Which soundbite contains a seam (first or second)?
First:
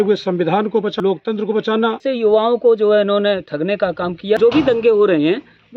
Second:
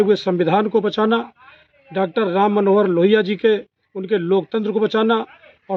first